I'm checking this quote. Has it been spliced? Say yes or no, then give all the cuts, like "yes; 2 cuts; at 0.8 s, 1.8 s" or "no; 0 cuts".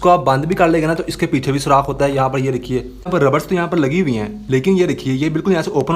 yes; 1 cut; at 3.0 s